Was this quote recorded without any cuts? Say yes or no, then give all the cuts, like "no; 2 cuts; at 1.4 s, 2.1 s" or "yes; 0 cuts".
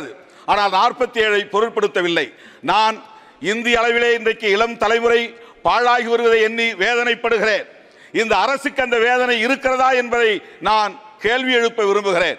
yes; 0 cuts